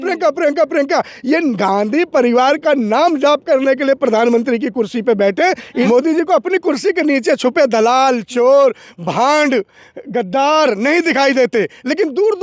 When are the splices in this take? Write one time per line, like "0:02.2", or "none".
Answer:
0:05.8